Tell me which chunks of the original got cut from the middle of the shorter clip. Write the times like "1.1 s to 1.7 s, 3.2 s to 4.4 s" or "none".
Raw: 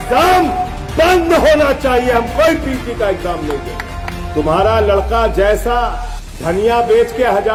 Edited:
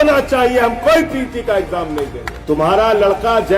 3.8 s to 4.1 s